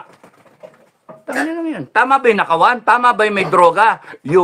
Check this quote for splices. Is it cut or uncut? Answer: uncut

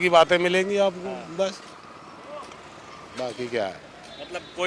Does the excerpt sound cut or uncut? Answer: uncut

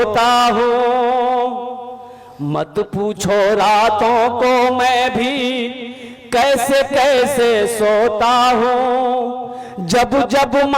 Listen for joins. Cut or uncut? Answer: uncut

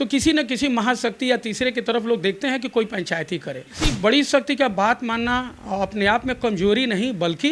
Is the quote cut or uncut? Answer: cut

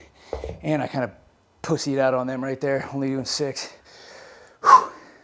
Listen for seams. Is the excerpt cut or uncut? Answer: uncut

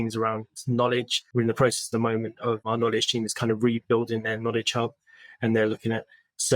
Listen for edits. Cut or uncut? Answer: cut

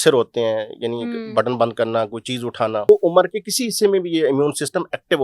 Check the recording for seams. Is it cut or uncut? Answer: cut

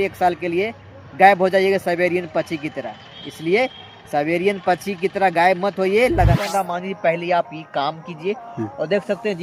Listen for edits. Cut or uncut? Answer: cut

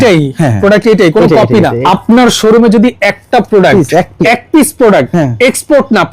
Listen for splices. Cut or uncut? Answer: cut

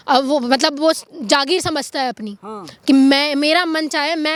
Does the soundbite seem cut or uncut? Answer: uncut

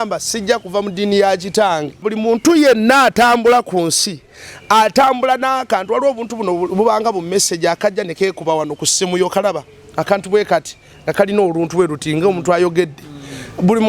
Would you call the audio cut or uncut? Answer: cut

